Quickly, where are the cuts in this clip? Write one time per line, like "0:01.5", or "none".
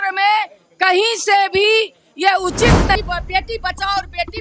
0:02.9